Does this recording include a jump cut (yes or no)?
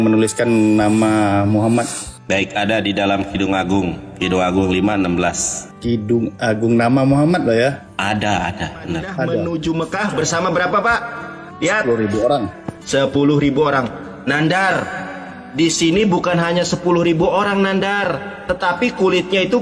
yes